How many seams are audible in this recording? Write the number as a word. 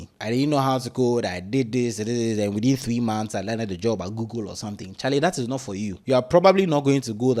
zero